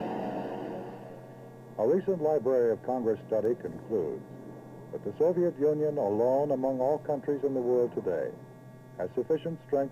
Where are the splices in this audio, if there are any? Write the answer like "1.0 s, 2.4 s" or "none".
3.2 s